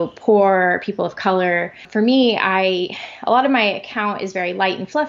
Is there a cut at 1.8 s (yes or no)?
yes